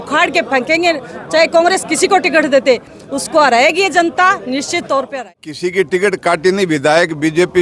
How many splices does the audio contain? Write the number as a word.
one